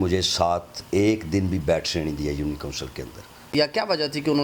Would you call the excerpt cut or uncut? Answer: cut